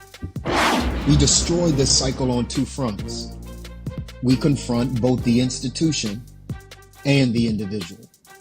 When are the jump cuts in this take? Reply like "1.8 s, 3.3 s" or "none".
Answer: none